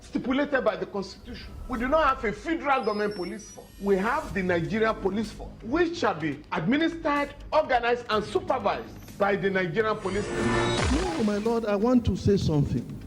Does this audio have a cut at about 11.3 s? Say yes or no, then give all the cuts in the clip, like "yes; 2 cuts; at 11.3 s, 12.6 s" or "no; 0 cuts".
no; 1 cut; at 8.0 s